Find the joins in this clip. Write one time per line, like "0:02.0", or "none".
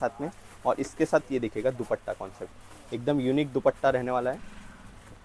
none